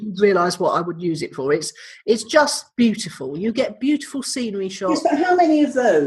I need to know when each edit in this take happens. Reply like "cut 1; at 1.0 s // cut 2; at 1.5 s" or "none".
none